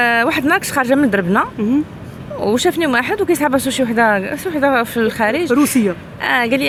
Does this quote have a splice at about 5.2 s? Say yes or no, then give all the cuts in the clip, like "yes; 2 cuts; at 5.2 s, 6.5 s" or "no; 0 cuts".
no; 0 cuts